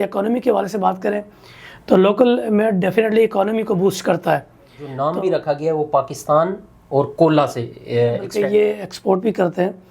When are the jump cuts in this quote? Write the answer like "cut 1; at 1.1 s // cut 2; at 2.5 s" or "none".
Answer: cut 1; at 4.9 s // cut 2; at 8.3 s